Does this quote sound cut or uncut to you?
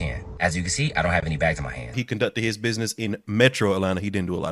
cut